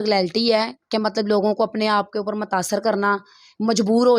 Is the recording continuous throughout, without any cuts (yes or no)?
yes